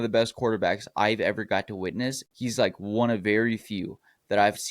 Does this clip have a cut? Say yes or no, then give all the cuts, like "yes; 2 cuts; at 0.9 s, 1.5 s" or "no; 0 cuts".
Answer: yes; 1 cut; at 2.3 s